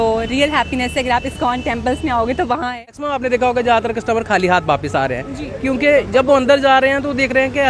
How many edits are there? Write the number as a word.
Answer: one